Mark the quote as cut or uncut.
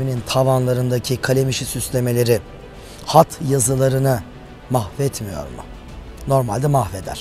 uncut